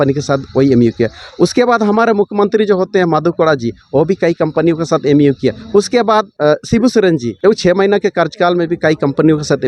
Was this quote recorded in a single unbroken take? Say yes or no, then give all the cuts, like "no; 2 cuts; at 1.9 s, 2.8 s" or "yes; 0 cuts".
no; 2 cuts; at 6.3 s, 7.3 s